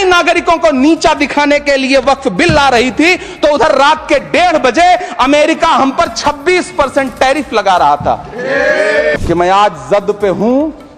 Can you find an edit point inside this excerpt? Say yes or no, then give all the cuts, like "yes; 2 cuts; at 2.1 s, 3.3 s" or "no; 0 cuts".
yes; 1 cut; at 9.2 s